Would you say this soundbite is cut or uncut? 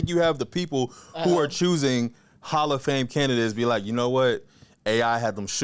uncut